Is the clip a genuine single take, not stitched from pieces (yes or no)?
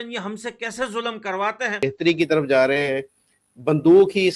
no